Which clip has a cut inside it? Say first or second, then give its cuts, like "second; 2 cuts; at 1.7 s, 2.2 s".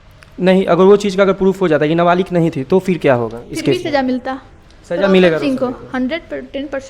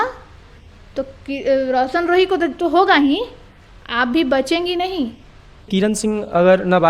second; 1 cut; at 5.7 s